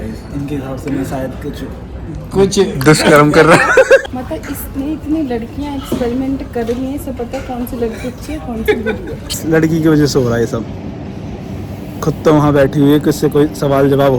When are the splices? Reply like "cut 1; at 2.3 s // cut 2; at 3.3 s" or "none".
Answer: cut 1; at 4.0 s // cut 2; at 9.3 s